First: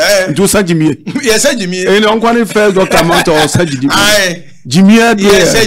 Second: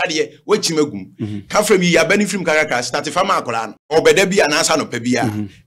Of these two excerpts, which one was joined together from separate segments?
second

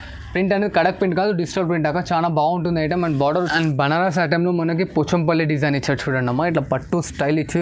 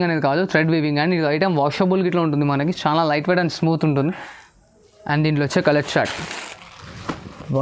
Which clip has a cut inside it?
first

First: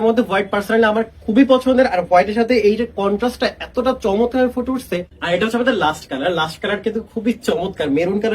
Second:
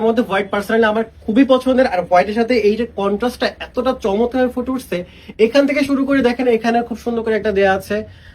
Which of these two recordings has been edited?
first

